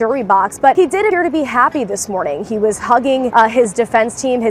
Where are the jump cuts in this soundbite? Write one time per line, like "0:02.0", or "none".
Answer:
0:01.0
0:03.3